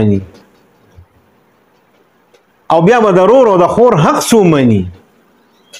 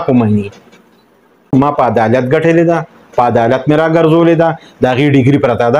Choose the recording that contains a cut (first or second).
second